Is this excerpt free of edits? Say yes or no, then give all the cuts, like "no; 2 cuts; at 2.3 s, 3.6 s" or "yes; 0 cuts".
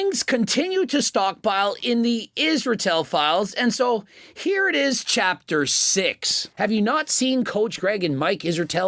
no; 1 cut; at 6.5 s